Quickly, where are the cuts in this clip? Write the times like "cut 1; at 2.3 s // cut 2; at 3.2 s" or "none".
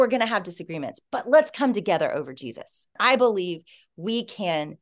cut 1; at 2.9 s